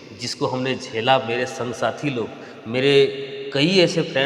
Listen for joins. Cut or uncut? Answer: uncut